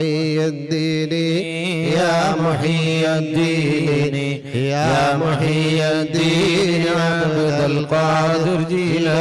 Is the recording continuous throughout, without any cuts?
yes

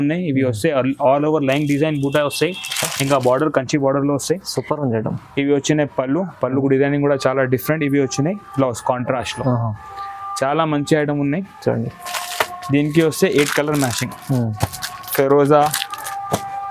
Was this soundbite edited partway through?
no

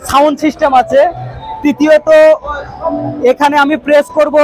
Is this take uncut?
yes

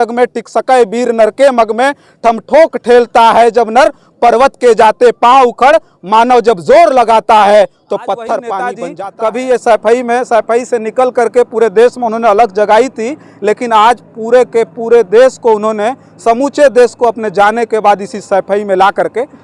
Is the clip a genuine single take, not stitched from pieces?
no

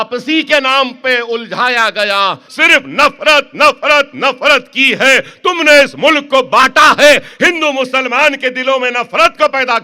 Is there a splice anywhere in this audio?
yes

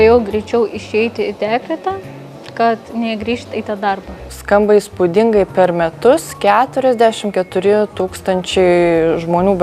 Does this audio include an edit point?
yes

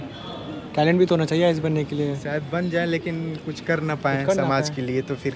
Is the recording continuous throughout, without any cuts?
yes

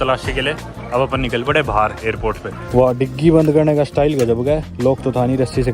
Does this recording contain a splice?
yes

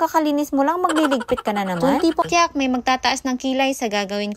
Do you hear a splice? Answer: yes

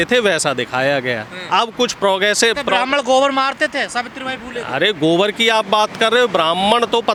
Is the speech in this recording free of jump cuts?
yes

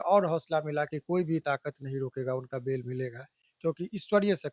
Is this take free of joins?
yes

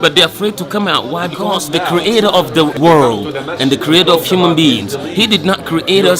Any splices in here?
yes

